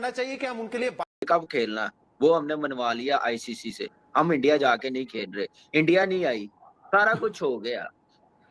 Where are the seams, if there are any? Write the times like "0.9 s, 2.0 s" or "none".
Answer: 1.1 s

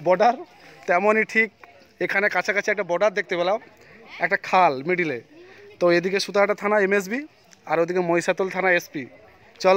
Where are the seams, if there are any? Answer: none

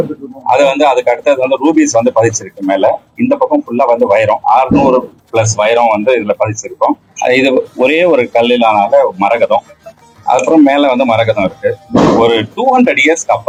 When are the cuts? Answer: none

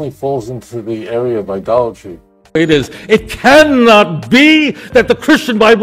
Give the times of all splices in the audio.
2.5 s

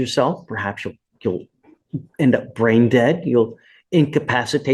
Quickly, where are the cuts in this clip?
none

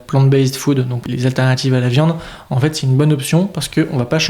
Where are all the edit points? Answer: 1.0 s

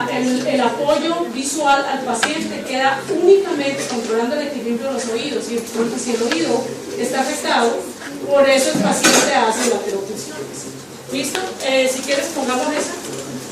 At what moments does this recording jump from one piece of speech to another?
3.3 s

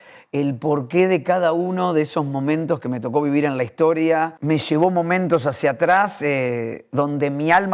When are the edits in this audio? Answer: 4.4 s

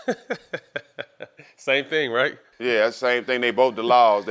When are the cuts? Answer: 2.5 s

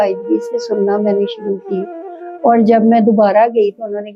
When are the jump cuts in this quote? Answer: none

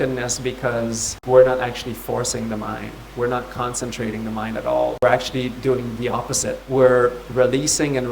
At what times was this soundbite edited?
1.1 s, 5.0 s, 6.6 s

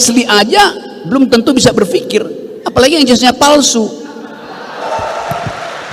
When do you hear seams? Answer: 4.8 s

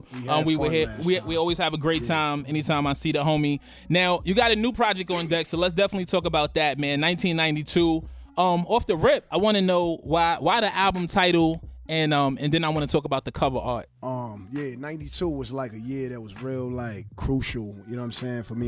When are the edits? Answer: 1.3 s

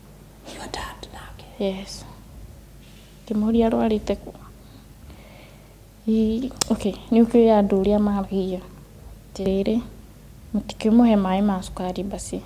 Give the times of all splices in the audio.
9.4 s

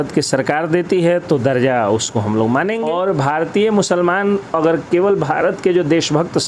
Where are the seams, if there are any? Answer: 2.8 s

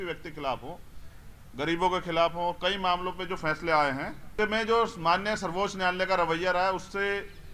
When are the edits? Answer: 4.3 s

